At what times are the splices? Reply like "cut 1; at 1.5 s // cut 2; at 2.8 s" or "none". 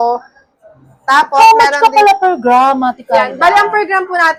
none